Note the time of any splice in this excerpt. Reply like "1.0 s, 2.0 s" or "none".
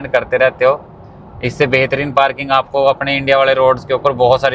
none